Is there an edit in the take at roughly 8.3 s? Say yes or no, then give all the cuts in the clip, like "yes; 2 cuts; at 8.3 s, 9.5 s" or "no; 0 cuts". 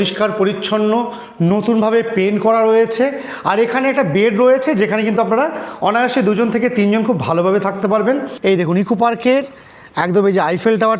yes; 1 cut; at 8.3 s